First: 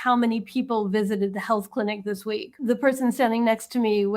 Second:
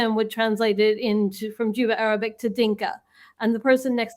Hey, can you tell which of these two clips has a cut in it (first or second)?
first